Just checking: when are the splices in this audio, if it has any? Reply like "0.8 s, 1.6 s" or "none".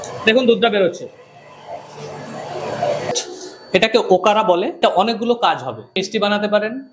3.1 s, 4.8 s, 6.0 s